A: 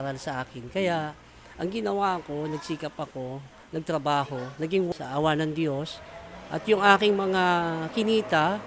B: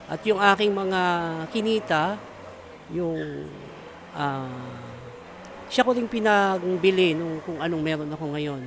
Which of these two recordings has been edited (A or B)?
A